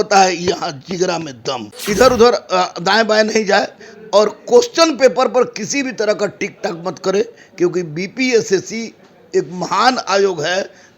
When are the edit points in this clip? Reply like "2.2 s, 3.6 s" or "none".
1.7 s